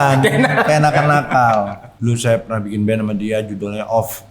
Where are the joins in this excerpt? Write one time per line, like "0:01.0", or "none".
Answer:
0:01.9